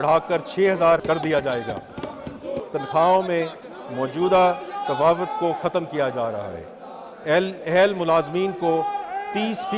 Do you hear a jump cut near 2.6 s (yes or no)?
yes